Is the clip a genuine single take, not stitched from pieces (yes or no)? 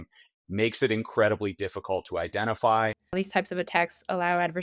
no